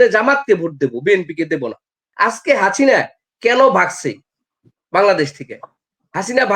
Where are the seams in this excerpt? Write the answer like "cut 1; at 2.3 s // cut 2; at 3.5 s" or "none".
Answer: cut 1; at 2.1 s